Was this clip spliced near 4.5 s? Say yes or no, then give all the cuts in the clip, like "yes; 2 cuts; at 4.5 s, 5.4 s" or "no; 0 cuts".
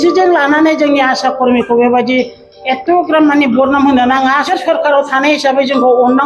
yes; 1 cut; at 4.5 s